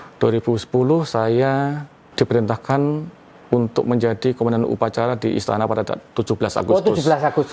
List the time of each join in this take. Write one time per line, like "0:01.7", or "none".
0:02.0